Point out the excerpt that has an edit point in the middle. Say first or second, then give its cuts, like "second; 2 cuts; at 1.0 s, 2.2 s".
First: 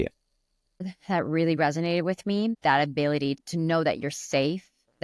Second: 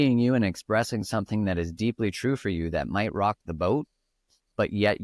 first; 3 cuts; at 0.9 s, 2.6 s, 3.5 s